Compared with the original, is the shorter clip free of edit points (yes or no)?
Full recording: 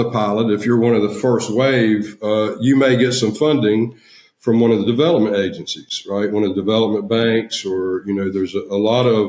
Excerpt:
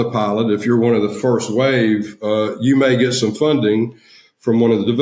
yes